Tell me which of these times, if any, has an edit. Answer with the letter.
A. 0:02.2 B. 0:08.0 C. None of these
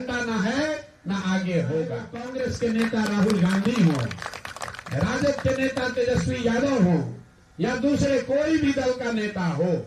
A